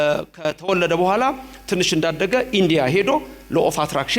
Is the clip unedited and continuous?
yes; 0 cuts

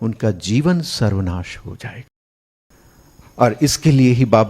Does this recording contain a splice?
yes; 1 cut; at 2.6 s

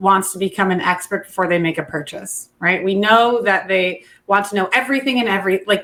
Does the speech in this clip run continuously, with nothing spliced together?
yes; 0 cuts

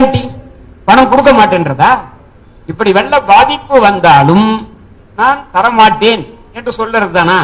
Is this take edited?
no; 0 cuts

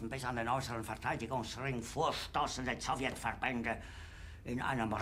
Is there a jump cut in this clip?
no; 0 cuts

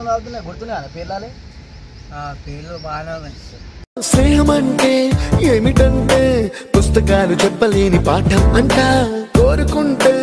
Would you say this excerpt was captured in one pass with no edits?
yes; 0 cuts

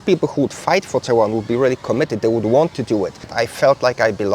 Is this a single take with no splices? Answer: no; 1 cut; at 3.4 s

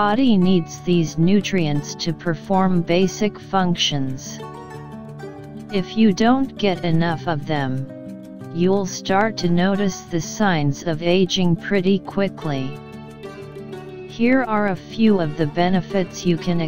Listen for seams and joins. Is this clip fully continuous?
yes; 0 cuts

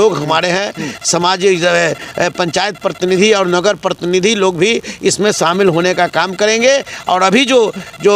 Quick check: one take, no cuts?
yes; 0 cuts

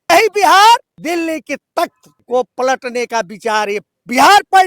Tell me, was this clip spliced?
yes; 2 cuts; at 0.9 s, 2.1 s

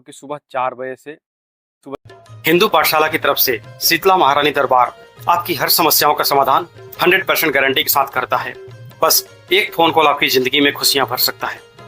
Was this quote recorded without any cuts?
no; 1 cut; at 1.9 s

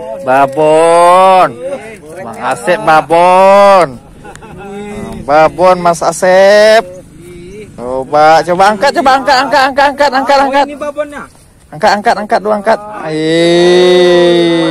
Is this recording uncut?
yes; 0 cuts

